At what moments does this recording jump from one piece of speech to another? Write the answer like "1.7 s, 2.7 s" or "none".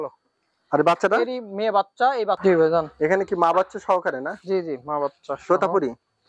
2.4 s